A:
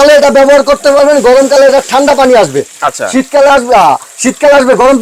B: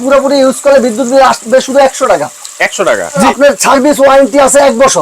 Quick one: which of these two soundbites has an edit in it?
B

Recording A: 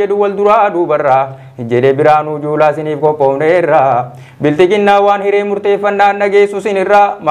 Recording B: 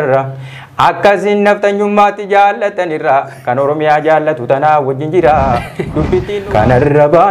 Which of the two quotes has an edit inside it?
B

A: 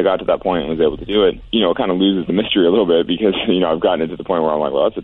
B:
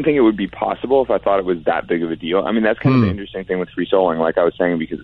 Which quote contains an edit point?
A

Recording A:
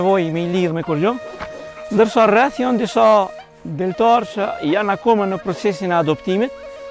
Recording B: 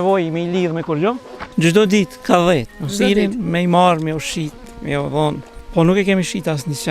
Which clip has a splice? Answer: B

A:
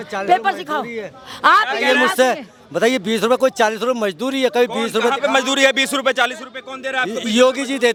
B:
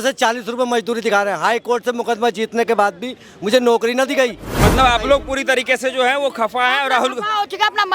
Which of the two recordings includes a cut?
B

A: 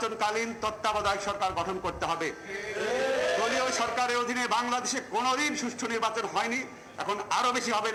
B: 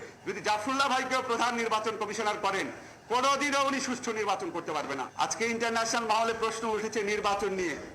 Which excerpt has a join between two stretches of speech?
B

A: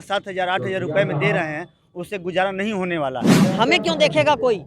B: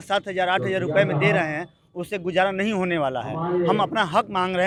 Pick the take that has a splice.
A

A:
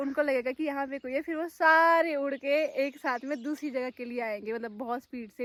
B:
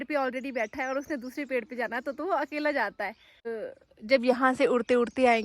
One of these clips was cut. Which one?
B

